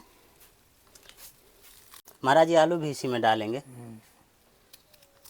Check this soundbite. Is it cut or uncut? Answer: uncut